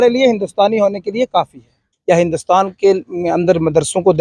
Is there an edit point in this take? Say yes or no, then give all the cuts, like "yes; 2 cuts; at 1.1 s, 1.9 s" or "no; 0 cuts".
yes; 1 cut; at 1.9 s